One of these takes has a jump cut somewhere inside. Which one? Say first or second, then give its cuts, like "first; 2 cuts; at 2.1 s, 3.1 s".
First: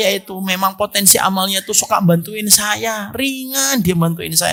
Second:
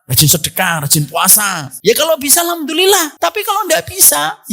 second; 2 cuts; at 1.7 s, 3.1 s